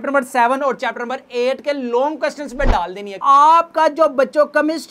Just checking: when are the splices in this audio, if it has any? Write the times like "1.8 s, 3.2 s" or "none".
3.2 s